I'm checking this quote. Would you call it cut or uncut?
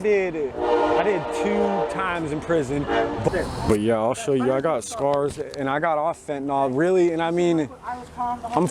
cut